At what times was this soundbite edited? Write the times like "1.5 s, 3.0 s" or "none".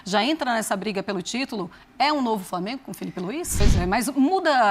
3.6 s